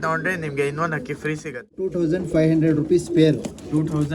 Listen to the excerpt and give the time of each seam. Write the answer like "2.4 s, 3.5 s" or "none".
1.8 s